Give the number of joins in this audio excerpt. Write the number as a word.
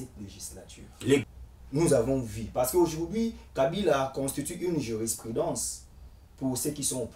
one